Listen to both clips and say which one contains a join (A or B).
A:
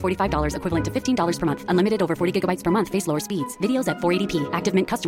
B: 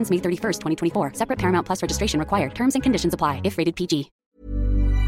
B